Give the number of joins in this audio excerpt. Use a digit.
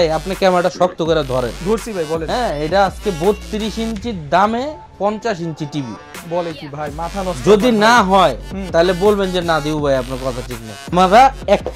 1